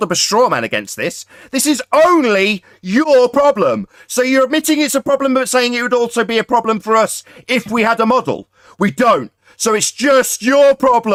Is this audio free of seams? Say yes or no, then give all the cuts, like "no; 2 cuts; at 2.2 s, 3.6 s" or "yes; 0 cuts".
yes; 0 cuts